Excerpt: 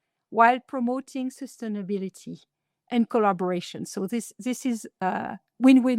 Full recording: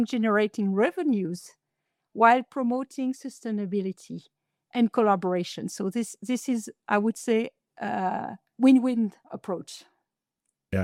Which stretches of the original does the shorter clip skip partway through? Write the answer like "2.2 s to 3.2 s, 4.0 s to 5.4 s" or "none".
6.8 s to 8.0 s

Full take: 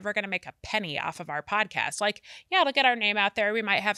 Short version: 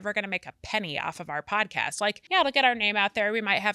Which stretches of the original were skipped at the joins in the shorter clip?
2.2 s to 2.4 s

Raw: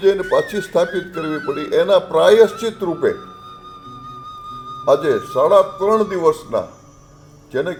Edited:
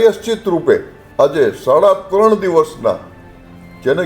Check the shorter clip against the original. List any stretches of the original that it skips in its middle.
3.3 s to 4.7 s

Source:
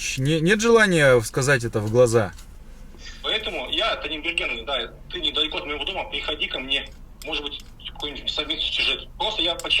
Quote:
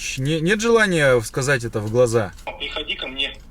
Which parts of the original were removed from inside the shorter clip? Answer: 2.5 s to 6.0 s

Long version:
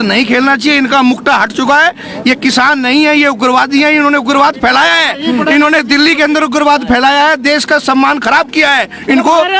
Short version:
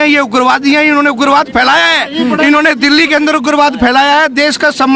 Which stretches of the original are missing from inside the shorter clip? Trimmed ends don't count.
none

